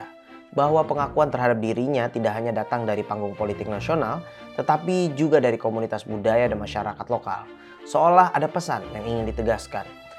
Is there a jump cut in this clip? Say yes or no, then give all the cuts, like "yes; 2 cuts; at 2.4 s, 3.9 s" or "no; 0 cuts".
no; 0 cuts